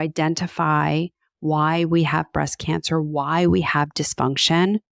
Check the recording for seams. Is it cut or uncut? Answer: uncut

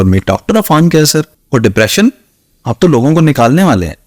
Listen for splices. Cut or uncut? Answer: cut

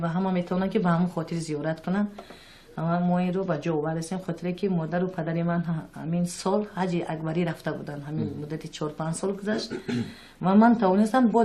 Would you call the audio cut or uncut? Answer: cut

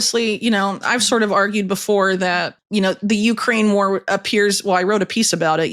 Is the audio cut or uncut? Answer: cut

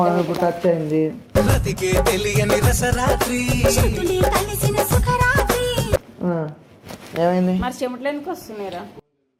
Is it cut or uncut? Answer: uncut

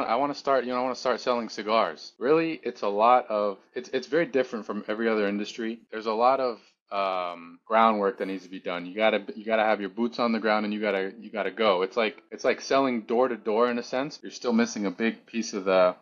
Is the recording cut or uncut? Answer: cut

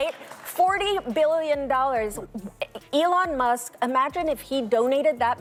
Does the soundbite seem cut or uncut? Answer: uncut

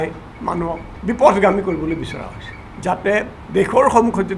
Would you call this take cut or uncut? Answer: cut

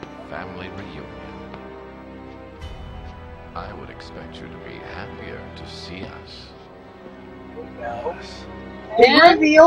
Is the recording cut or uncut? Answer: uncut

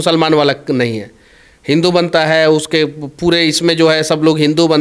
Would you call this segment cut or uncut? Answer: uncut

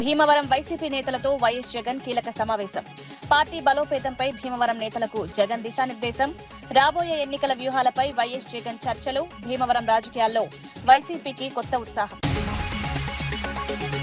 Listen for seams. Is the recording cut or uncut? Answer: uncut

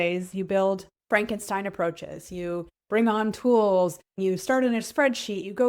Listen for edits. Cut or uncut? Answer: cut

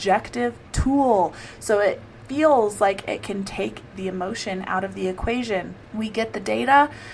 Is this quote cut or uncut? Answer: cut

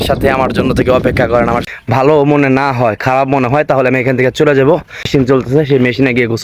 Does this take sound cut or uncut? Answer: cut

